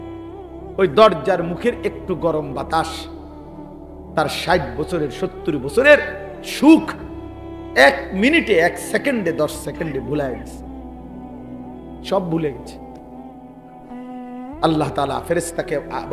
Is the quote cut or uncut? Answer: cut